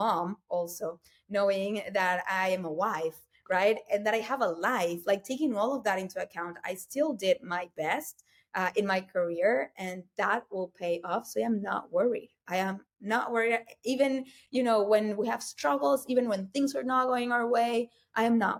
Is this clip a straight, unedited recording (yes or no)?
yes